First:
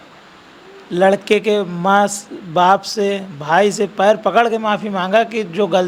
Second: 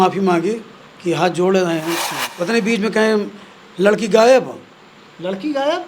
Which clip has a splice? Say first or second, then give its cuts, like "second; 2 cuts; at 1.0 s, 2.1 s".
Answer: second; 1 cut; at 2.2 s